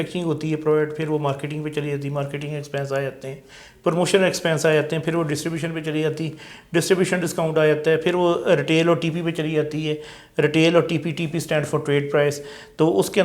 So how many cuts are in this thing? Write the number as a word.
zero